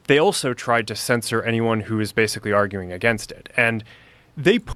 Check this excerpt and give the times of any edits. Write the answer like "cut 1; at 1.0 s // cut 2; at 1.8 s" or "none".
none